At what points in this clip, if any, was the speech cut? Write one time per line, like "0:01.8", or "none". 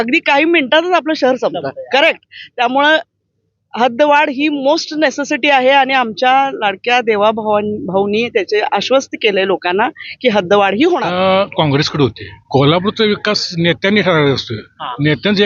0:11.1
0:12.3